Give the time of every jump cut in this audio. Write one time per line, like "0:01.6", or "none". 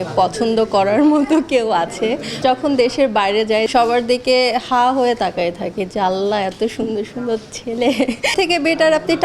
0:02.4
0:03.7
0:08.3